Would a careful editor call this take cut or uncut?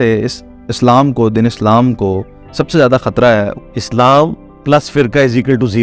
cut